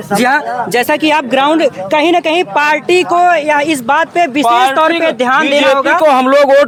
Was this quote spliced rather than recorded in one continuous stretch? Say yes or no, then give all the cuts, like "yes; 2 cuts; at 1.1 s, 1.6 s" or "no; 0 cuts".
no; 0 cuts